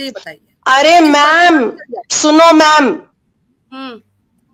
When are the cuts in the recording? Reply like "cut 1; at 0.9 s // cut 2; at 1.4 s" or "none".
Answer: none